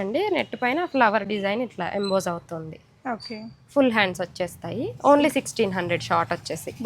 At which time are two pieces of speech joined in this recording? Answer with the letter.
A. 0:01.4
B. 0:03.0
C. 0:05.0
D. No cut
D